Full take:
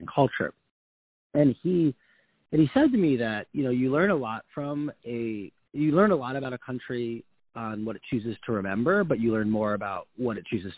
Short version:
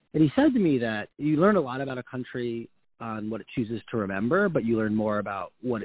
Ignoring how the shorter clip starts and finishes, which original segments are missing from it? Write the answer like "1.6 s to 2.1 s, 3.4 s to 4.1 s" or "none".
3.4 s to 5.6 s